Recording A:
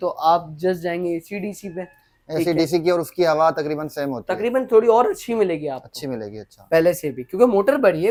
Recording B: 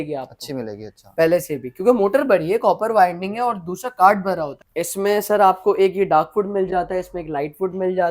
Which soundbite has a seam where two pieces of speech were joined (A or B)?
B